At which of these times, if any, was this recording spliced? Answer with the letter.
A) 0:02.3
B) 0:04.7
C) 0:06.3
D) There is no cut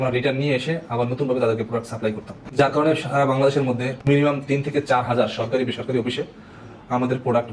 A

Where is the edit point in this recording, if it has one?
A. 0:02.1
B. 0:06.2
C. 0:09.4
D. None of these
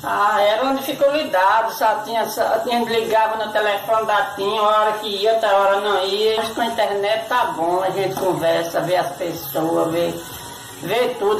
D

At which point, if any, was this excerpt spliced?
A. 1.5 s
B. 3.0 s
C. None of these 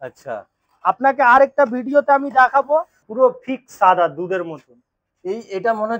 B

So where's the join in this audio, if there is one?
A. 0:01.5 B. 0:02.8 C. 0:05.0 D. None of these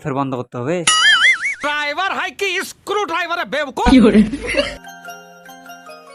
D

